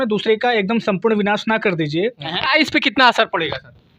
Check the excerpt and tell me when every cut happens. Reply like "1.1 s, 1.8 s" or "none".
2.3 s